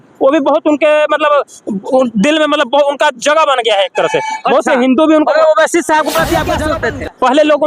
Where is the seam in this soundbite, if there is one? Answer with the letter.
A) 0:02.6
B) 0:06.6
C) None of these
B